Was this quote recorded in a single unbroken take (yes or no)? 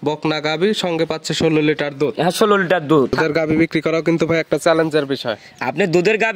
no